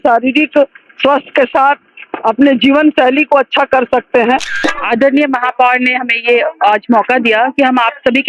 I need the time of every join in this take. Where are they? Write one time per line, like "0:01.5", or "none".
0:04.6